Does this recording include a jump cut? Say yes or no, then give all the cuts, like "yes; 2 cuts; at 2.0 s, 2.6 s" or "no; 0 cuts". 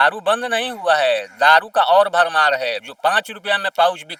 no; 0 cuts